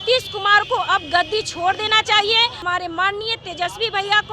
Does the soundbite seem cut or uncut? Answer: cut